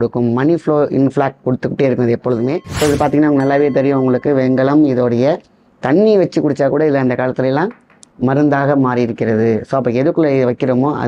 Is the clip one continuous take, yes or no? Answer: no